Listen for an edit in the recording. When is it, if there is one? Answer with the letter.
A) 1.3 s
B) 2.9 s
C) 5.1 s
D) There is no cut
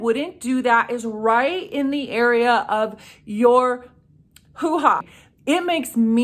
C